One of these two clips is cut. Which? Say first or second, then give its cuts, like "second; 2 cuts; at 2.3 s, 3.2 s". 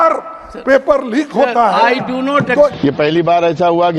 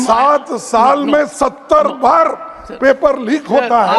first; 1 cut; at 2.8 s